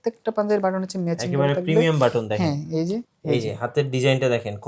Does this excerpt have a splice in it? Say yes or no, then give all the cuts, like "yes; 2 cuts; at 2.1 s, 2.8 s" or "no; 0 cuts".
yes; 1 cut; at 3.1 s